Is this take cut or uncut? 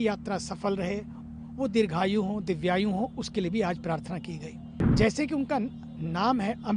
cut